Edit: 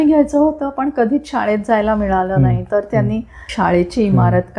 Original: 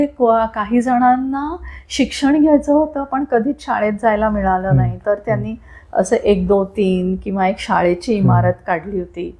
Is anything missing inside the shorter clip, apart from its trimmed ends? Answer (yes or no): yes